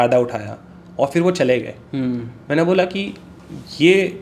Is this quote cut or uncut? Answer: uncut